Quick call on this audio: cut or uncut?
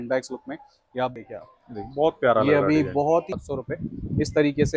cut